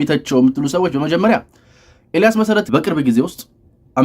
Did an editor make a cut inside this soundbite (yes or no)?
yes